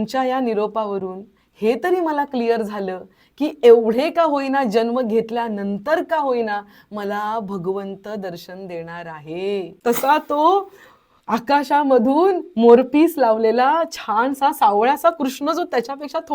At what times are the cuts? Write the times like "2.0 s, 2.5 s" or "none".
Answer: 9.7 s